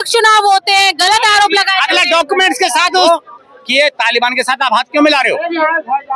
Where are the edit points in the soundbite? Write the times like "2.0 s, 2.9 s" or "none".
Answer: 3.1 s